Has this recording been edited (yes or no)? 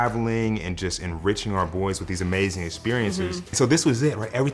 yes